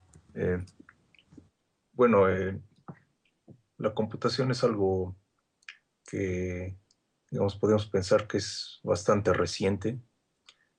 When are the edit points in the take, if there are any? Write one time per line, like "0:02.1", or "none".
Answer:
0:08.4